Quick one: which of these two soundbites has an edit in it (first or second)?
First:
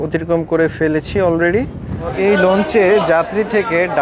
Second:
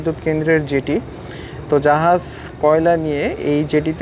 first